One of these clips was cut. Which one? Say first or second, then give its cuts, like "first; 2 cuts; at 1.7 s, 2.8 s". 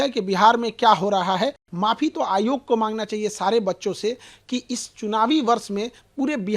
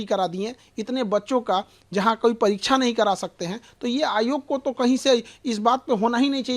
first; 1 cut; at 1.6 s